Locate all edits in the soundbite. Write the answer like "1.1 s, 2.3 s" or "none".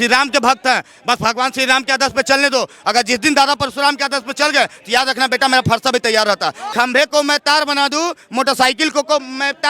6.6 s

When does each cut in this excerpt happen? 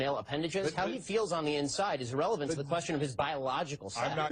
1.7 s

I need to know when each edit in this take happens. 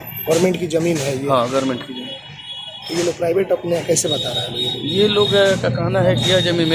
none

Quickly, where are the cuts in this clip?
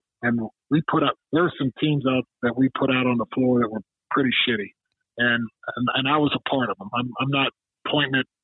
1.2 s, 2.3 s

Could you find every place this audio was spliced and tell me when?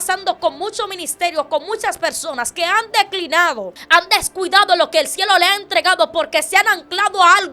3.8 s

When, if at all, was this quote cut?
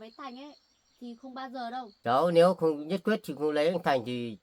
1.9 s

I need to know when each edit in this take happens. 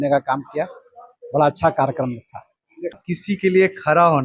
3.0 s

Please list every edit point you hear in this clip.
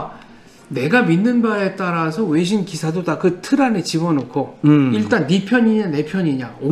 none

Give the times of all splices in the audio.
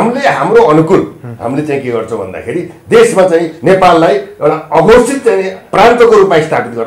5.6 s

